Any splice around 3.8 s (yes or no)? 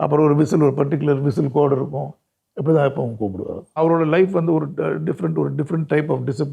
yes